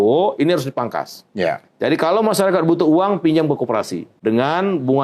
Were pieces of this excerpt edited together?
yes; 1 cut; at 4.0 s

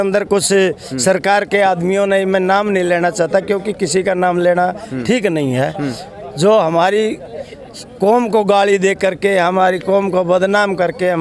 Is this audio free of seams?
yes; 0 cuts

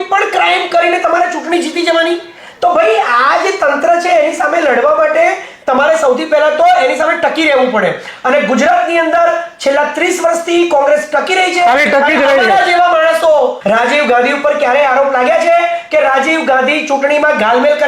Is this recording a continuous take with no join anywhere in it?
no; 1 cut; at 13.6 s

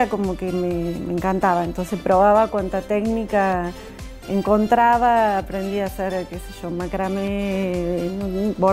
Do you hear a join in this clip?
no; 0 cuts

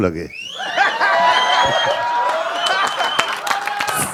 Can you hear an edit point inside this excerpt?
no; 0 cuts

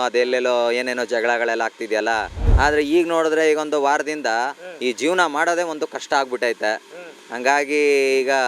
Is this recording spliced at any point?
yes; 1 cut; at 2.4 s

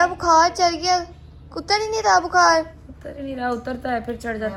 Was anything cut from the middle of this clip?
no; 0 cuts

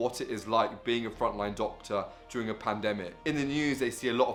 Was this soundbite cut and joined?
no; 0 cuts

